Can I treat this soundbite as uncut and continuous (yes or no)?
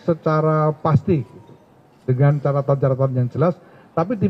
yes